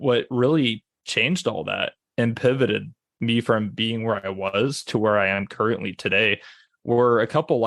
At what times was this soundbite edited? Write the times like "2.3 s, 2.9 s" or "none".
3.0 s